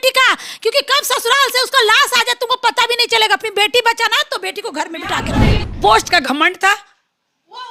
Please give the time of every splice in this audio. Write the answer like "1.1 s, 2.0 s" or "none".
5.7 s